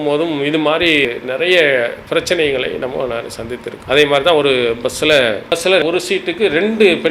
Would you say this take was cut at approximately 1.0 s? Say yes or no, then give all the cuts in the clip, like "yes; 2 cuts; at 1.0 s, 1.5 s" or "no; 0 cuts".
yes; 3 cuts; at 1.0 s, 3.7 s, 5.5 s